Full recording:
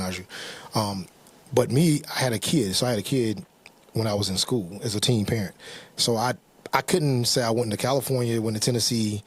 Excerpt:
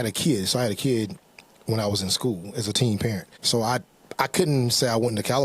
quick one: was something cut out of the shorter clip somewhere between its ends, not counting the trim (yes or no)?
yes